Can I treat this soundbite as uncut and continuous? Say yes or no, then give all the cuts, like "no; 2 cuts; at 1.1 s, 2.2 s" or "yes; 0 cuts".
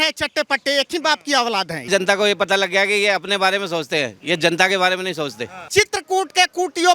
no; 2 cuts; at 1.9 s, 5.6 s